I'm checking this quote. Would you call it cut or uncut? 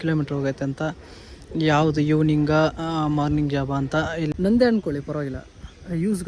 cut